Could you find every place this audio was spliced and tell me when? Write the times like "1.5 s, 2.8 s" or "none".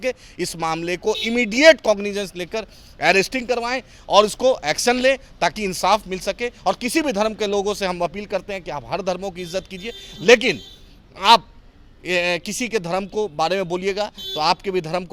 none